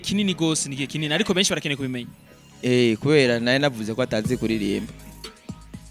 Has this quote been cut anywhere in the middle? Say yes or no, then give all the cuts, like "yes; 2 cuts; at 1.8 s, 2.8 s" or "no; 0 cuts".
yes; 1 cut; at 5.0 s